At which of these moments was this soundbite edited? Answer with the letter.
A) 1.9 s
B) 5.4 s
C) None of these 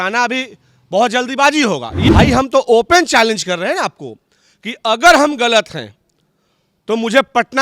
A